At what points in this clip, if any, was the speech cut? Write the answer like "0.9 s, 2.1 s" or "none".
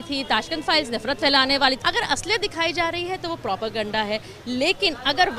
1.8 s